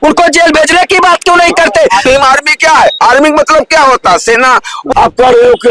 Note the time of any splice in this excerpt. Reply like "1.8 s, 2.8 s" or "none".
2.0 s, 4.8 s

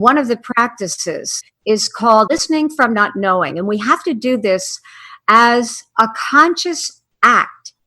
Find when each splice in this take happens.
1.3 s, 2.3 s

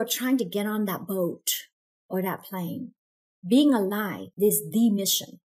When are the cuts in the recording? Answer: 4.2 s

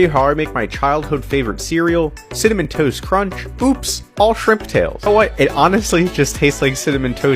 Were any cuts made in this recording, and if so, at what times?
5.1 s

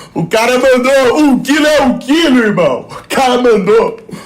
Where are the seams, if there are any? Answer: none

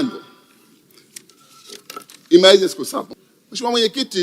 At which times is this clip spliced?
3.1 s

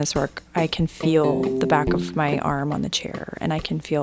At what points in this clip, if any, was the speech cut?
1.5 s

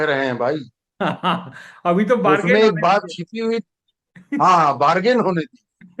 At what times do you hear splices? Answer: none

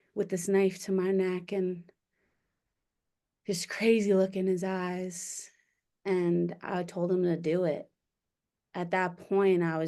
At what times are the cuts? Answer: none

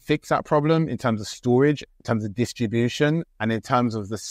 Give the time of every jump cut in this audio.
1.9 s, 3.3 s

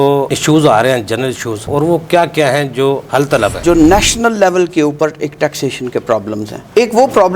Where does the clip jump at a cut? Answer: 1.7 s, 3.6 s

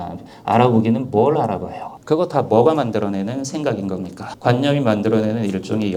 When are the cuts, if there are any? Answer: 4.3 s

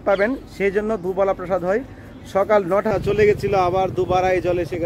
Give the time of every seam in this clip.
2.9 s

